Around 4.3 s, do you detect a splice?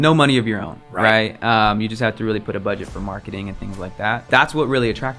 yes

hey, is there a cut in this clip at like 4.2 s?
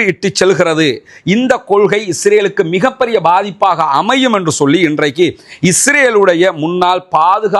no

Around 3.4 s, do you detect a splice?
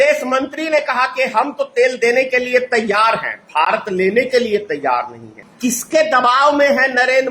no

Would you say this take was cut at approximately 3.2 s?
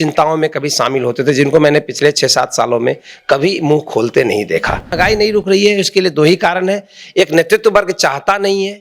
no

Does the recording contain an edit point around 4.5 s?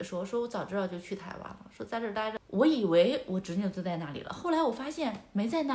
no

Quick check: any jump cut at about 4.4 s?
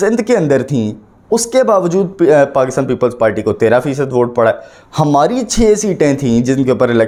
no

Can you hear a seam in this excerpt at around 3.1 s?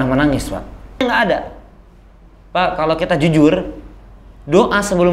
no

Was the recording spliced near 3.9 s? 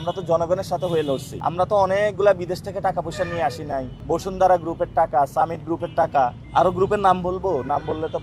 yes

